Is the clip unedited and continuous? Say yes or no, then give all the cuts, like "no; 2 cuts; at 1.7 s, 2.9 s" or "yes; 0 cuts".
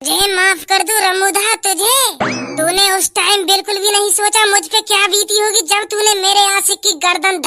yes; 0 cuts